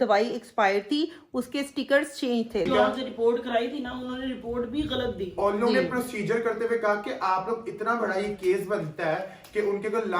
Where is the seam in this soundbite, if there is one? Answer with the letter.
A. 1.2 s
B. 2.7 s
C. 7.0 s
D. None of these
B